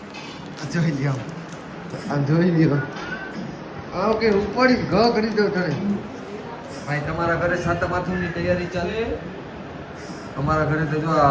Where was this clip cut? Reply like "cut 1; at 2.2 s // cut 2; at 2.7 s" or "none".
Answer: cut 1; at 3.2 s // cut 2; at 5.8 s // cut 3; at 8.9 s